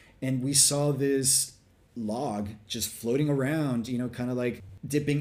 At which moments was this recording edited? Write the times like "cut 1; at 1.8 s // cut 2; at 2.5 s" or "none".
none